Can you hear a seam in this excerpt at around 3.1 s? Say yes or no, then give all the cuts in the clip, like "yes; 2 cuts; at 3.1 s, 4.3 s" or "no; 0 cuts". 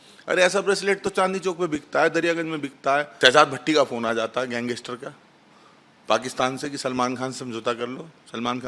yes; 1 cut; at 3.1 s